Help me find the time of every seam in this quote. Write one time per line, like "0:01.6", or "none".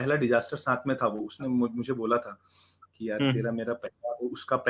none